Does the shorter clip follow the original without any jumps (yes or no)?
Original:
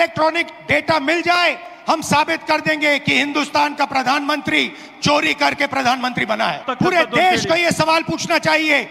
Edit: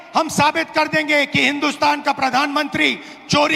yes